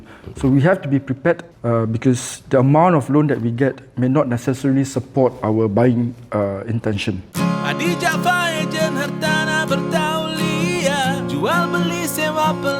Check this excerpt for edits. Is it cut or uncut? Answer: cut